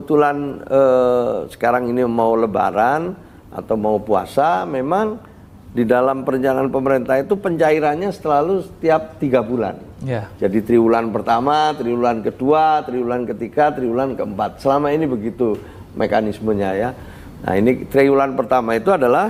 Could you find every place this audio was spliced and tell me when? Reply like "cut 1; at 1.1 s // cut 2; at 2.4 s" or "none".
none